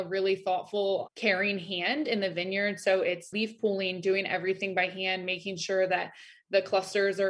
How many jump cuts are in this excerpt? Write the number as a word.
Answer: one